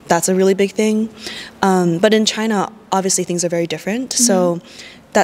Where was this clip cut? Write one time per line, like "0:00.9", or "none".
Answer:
none